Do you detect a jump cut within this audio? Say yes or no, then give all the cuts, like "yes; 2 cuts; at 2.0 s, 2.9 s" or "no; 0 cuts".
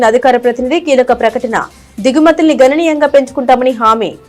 no; 0 cuts